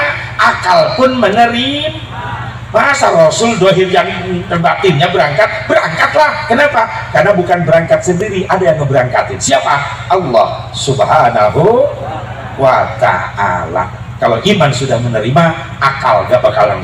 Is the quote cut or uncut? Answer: uncut